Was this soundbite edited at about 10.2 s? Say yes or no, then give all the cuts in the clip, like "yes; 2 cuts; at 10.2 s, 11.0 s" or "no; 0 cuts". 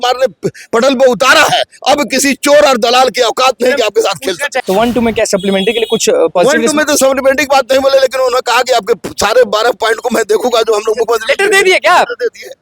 no; 1 cut; at 4.5 s